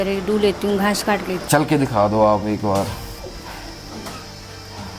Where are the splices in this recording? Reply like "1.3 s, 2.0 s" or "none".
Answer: 1.3 s, 3.1 s

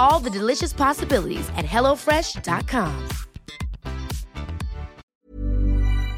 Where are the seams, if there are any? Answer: 5.0 s

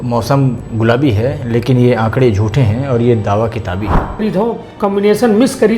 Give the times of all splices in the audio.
4.2 s

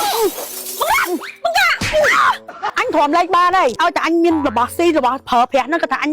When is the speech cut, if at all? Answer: 2.6 s, 3.8 s

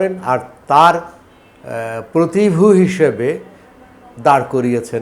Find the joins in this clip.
none

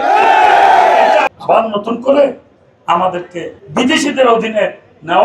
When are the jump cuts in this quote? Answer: 1.4 s, 3.5 s

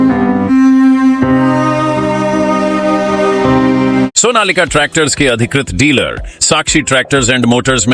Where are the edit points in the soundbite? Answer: 4.1 s

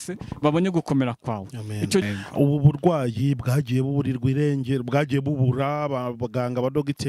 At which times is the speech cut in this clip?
2.0 s

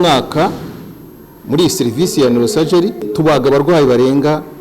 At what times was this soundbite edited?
3.1 s

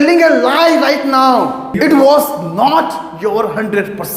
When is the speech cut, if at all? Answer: 1.7 s

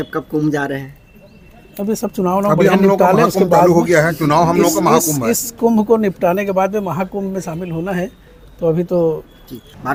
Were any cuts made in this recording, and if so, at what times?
none

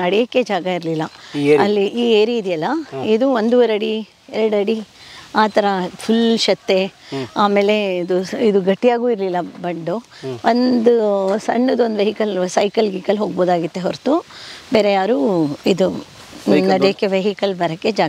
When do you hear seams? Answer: none

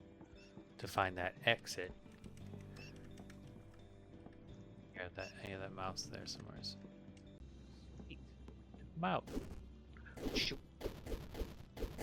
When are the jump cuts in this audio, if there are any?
7.4 s

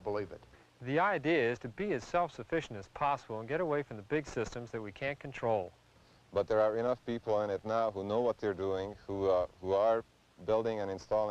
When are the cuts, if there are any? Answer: 9.5 s

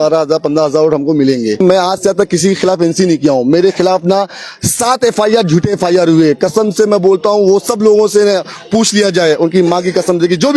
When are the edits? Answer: 1.6 s

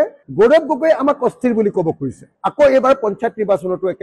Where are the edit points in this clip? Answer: 2.3 s

